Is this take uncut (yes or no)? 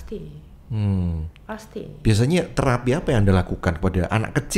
yes